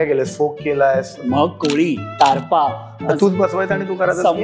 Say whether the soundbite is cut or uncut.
cut